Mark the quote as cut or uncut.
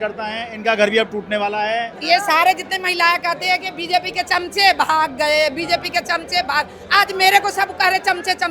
cut